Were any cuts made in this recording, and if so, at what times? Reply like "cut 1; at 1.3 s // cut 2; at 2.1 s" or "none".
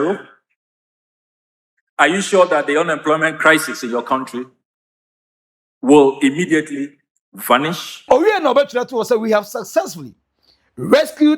cut 1; at 8.0 s

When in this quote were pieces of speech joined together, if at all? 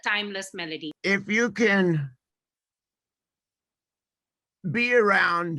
cut 1; at 1.0 s

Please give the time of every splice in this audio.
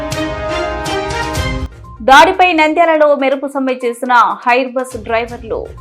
cut 1; at 1.6 s

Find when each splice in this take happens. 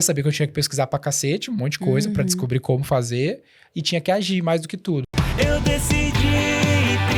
cut 1; at 5.1 s

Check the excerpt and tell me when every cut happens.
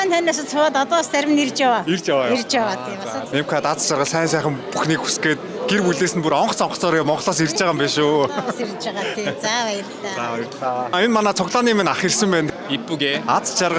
none

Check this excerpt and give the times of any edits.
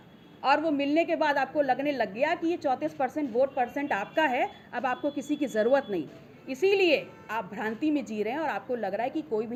none

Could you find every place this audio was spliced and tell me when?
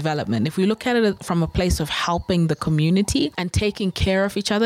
cut 1; at 3.4 s

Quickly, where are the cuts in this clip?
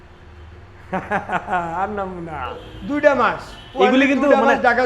cut 1; at 2.7 s

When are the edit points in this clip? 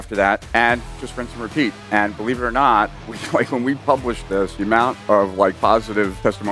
none

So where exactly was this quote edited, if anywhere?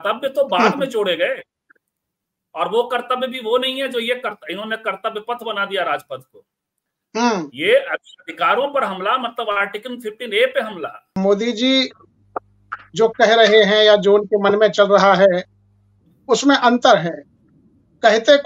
cut 1; at 11.0 s

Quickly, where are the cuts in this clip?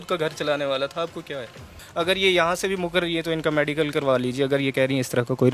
cut 1; at 1.7 s

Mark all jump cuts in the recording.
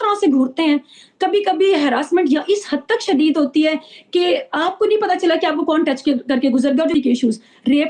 cut 1; at 6.9 s

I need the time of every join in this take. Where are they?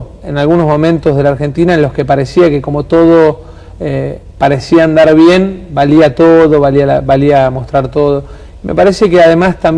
cut 1; at 8.2 s

